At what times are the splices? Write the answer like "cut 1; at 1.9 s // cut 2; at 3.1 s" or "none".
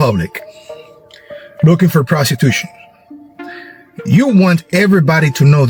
none